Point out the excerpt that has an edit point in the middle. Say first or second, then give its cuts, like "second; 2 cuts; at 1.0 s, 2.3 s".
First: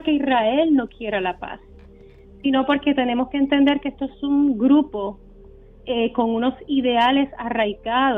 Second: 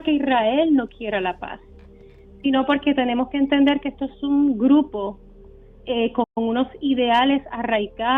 first; 1 cut; at 6.2 s